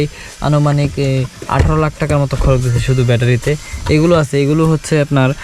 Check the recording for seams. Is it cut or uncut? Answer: uncut